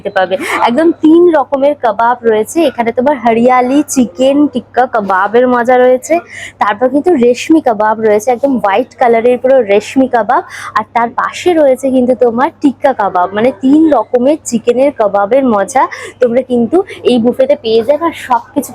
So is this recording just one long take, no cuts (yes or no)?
yes